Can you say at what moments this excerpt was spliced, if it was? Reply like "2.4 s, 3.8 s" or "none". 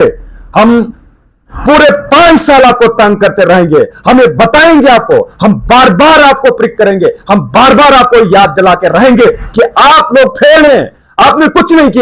none